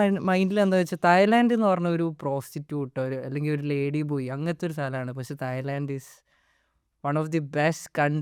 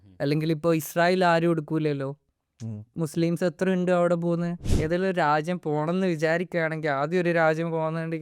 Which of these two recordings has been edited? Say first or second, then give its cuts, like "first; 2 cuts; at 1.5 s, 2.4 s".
second; 1 cut; at 4.6 s